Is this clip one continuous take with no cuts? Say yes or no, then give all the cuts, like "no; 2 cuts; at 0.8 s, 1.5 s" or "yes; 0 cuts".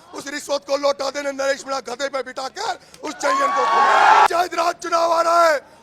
no; 1 cut; at 4.3 s